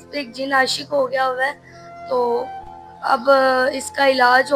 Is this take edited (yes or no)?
no